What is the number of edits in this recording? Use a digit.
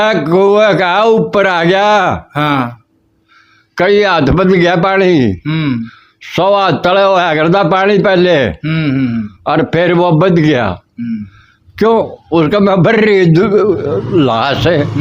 0